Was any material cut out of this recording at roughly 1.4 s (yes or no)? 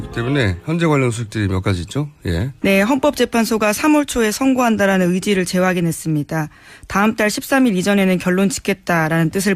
no